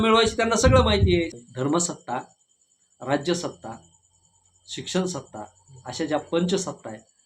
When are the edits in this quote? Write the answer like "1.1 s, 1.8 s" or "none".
1.3 s